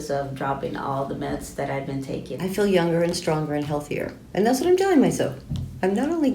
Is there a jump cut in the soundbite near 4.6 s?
no; 1 cut; at 2.3 s

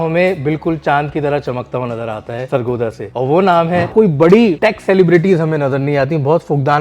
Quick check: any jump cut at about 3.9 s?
yes; 3 cuts; at 2.7 s, 3.9 s, 4.6 s

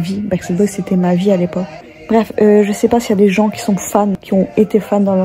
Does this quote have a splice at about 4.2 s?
yes; 2 cuts; at 1.7 s, 4.2 s

